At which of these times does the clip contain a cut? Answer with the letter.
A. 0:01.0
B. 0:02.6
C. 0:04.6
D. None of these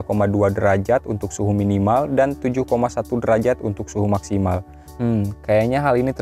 D